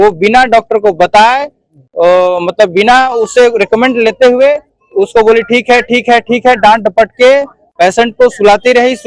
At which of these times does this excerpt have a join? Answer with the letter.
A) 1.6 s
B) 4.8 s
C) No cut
C